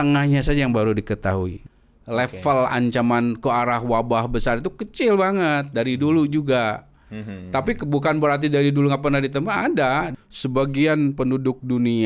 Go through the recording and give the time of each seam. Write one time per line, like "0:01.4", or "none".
0:01.6
0:10.1